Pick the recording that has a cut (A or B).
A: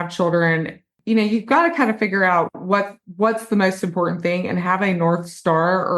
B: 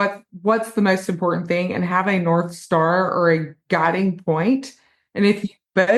A